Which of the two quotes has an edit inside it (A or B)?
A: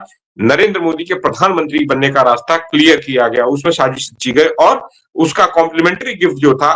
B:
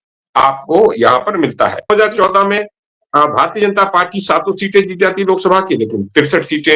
B